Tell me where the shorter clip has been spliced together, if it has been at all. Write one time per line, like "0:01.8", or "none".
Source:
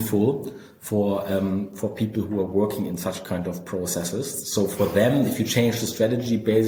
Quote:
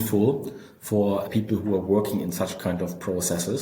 0:01.3